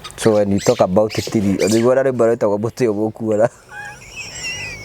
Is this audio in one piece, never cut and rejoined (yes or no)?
yes